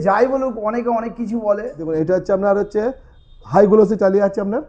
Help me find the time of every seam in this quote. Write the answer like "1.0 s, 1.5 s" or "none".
1.8 s